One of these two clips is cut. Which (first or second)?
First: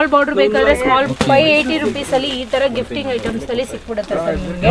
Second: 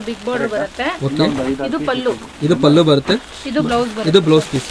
first